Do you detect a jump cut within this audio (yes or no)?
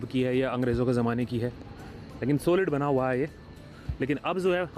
no